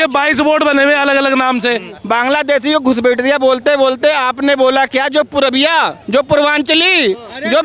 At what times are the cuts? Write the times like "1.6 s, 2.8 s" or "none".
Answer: 1.9 s, 6.0 s